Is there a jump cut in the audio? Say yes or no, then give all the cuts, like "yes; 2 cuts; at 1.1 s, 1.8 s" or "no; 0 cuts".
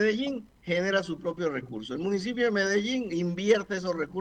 no; 0 cuts